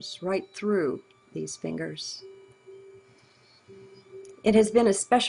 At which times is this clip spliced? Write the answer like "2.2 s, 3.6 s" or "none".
none